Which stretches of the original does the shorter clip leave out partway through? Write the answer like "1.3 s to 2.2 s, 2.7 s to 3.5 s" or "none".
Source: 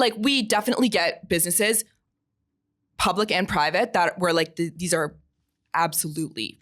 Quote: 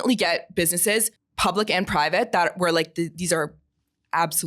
1.9 s to 2.8 s